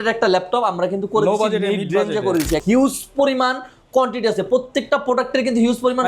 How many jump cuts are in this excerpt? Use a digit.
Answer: 1